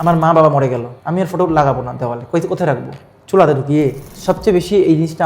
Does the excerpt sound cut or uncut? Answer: cut